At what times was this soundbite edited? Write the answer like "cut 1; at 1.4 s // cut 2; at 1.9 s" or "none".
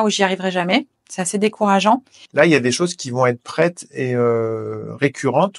cut 1; at 2.2 s